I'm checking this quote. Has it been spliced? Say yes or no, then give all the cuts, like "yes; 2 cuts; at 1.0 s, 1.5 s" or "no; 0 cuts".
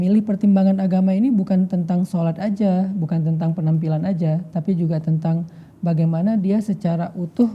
no; 0 cuts